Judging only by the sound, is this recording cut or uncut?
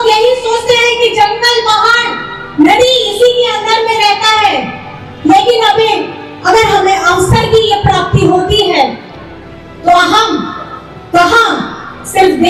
uncut